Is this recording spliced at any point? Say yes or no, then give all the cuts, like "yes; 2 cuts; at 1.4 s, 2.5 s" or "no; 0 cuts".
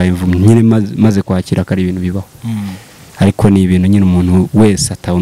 no; 0 cuts